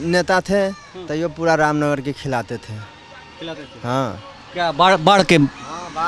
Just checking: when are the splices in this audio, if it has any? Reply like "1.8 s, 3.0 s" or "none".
none